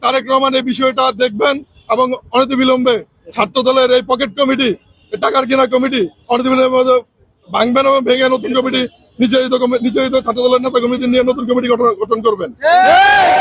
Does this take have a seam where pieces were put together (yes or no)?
no